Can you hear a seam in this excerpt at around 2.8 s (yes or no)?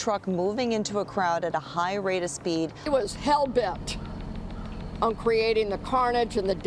no